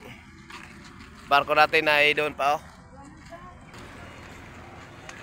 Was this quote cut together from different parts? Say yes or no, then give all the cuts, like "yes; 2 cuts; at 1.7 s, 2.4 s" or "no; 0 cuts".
yes; 1 cut; at 3.7 s